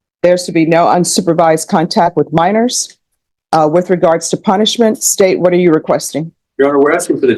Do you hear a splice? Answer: no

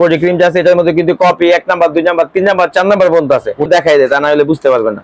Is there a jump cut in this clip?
yes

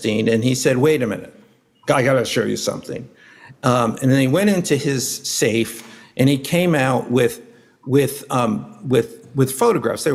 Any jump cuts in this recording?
no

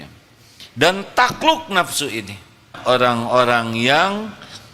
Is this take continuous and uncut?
no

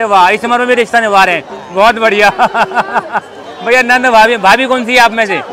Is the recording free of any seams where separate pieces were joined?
yes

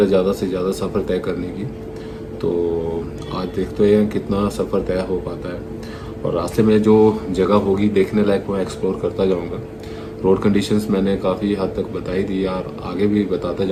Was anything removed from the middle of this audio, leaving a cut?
no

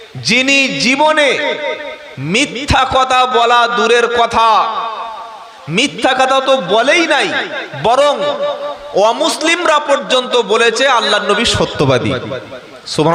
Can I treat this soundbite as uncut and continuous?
yes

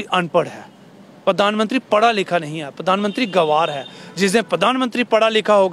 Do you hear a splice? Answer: no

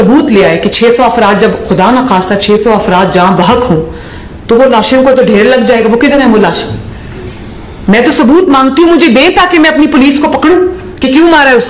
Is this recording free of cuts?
yes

